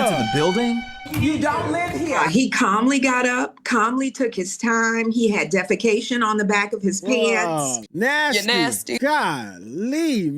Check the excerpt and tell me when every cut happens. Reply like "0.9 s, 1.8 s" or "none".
1.0 s, 7.9 s